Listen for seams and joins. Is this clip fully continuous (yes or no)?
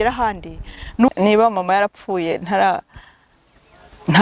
no